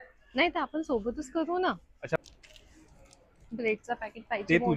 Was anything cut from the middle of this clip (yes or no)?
yes